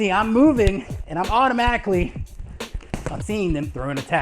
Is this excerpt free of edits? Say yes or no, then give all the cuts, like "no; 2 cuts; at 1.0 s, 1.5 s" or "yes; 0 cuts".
no; 1 cut; at 3.3 s